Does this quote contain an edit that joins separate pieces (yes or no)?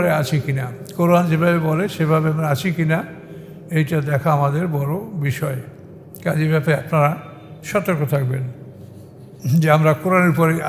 no